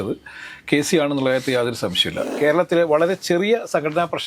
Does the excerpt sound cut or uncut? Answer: cut